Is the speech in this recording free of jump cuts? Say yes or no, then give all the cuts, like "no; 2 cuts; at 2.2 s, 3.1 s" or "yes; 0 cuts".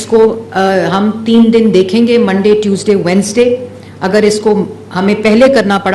yes; 0 cuts